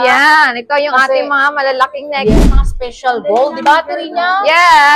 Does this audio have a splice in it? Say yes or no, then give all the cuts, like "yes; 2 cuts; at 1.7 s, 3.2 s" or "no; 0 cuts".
yes; 1 cut; at 2.3 s